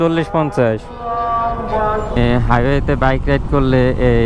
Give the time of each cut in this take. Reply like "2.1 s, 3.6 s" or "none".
2.2 s